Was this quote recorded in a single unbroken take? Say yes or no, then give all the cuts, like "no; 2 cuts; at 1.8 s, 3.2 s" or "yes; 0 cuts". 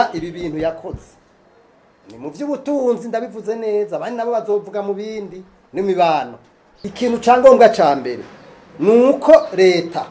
no; 1 cut; at 6.9 s